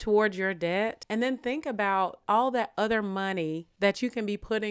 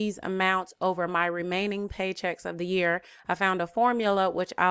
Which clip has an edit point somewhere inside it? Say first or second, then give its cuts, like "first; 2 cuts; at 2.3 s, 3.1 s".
first; 3 cuts; at 1.0 s, 2.2 s, 3.7 s